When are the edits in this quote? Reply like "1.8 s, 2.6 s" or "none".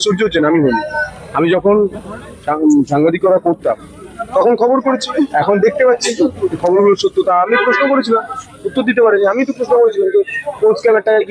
none